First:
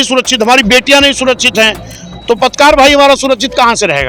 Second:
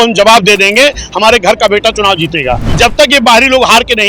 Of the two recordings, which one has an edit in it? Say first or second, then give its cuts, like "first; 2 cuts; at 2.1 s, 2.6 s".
second; 1 cut; at 2.7 s